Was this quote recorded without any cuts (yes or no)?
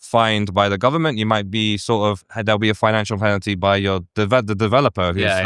yes